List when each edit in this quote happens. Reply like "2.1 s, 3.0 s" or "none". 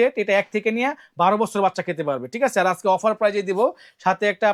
none